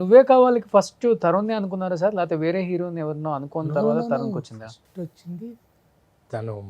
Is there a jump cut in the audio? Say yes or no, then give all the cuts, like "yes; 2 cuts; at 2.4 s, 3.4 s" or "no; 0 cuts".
no; 0 cuts